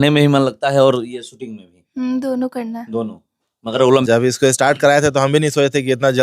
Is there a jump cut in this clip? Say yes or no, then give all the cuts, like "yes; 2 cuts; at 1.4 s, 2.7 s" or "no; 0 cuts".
yes; 1 cut; at 4.0 s